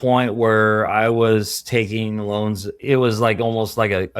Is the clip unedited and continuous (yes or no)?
no